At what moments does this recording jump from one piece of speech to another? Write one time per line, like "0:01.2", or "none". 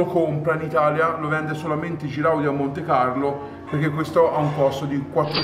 none